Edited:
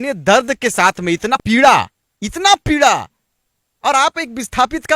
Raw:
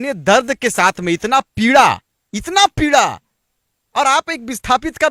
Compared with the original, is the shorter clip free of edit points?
no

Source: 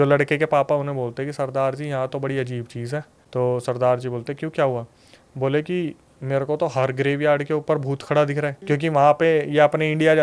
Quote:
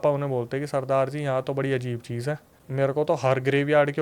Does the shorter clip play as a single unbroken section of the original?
no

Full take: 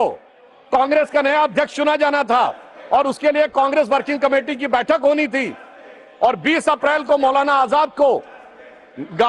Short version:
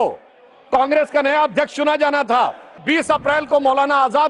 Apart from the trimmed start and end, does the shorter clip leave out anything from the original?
yes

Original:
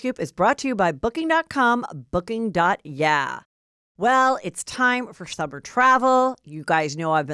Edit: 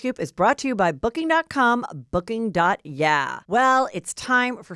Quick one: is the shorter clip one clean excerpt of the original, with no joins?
no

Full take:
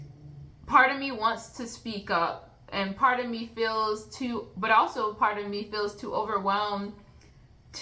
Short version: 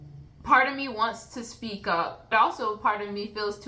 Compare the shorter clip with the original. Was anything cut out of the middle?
yes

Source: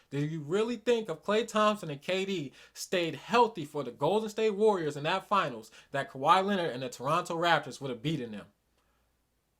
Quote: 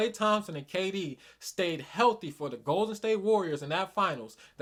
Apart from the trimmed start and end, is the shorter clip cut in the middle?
no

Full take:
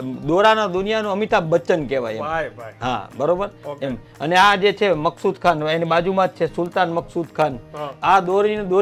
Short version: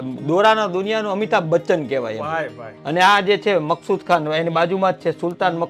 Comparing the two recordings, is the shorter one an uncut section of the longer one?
no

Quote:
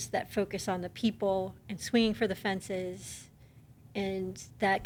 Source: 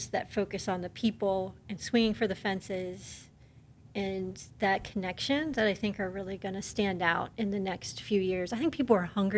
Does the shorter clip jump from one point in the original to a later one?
no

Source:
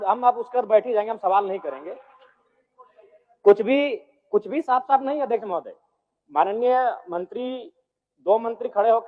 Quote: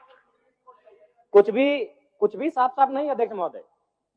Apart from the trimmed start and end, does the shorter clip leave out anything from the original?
no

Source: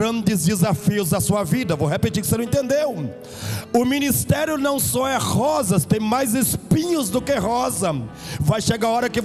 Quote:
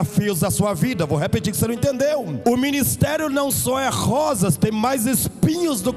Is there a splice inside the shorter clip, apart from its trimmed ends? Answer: yes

